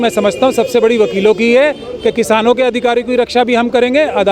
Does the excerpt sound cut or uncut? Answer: uncut